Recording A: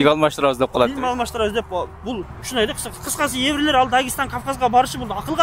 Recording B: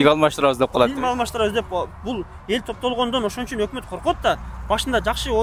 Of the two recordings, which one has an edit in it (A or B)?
A